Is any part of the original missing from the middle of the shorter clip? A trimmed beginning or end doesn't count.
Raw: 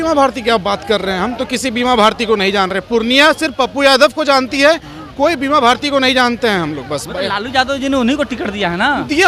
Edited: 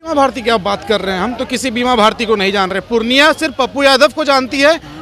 no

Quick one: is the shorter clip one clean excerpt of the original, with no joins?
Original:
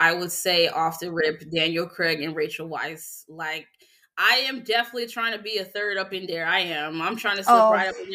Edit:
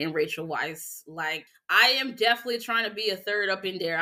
no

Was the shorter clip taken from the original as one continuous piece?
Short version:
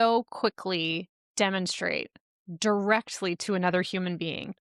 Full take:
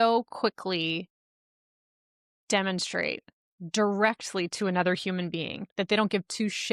no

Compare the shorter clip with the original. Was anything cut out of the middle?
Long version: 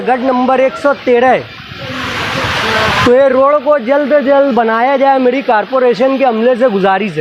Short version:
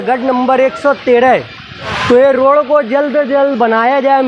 yes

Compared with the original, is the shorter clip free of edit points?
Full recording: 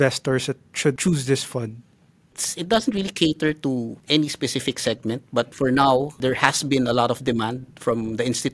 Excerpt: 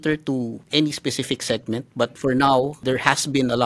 yes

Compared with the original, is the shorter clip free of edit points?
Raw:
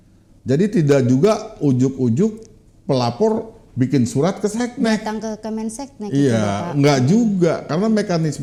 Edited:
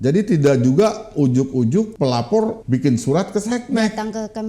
no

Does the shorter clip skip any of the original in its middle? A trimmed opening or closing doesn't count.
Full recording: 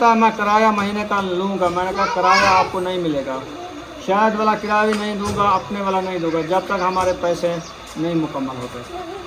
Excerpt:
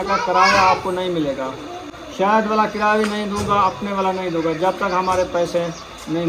no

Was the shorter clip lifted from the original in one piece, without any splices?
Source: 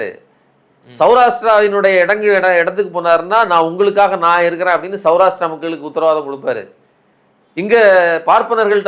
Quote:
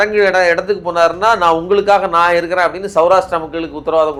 yes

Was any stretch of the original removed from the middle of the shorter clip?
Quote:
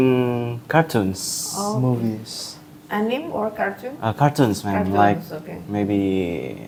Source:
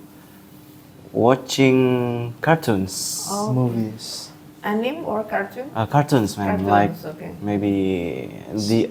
no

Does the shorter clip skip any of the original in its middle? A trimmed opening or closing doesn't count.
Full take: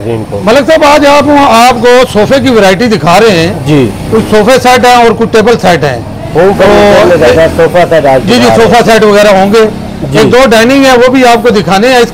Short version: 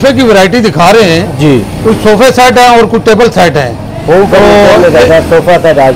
no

